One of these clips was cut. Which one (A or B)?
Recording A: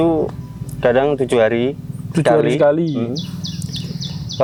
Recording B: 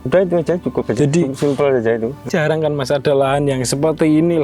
B